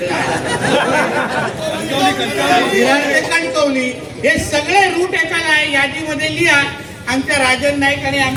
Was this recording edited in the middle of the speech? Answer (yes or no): no